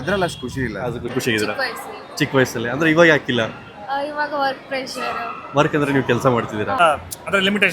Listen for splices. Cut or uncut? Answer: cut